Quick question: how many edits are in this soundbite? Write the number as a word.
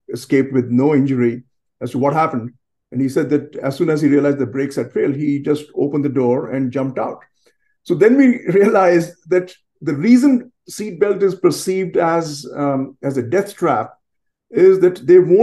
zero